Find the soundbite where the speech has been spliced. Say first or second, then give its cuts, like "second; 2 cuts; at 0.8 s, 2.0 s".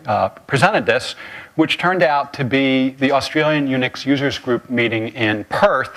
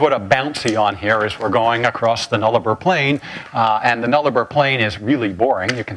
first; 1 cut; at 2.3 s